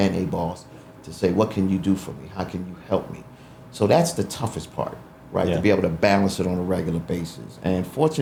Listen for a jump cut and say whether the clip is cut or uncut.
uncut